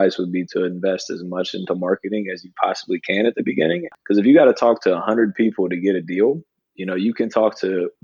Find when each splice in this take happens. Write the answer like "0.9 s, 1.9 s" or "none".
3.9 s